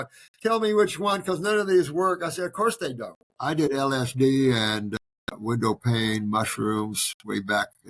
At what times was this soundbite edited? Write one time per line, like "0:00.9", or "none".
0:03.4